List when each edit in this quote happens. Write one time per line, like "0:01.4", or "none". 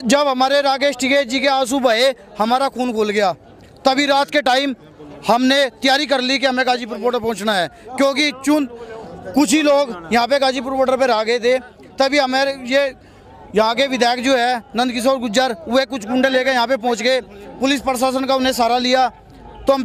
none